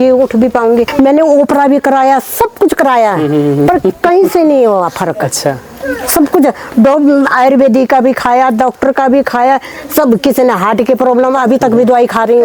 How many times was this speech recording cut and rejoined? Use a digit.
0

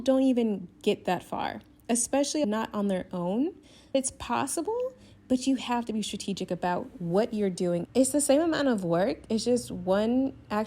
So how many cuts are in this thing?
2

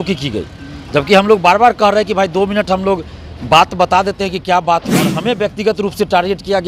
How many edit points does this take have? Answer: 1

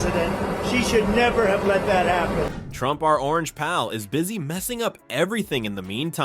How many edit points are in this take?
0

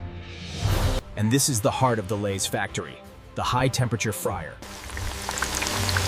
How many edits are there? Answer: 2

